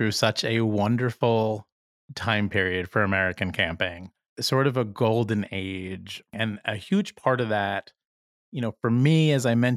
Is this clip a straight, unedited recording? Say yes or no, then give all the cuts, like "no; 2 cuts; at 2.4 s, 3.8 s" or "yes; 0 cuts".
no; 2 cuts; at 4.3 s, 6.3 s